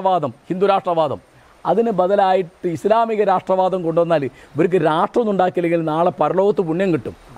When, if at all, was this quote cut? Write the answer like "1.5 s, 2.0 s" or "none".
none